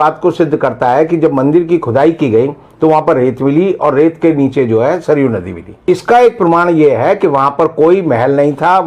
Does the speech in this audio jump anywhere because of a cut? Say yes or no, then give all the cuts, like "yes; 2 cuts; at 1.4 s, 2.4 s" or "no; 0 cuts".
yes; 1 cut; at 5.8 s